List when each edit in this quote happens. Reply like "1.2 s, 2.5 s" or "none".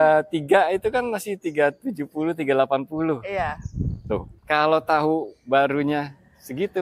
4.3 s